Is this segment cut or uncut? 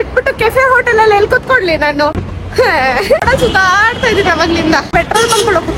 cut